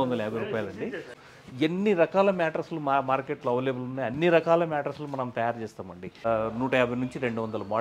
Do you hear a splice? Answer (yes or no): yes